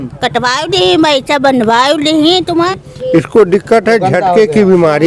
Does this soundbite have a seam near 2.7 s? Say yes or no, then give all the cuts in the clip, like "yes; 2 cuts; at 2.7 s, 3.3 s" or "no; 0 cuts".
yes; 1 cut; at 2.7 s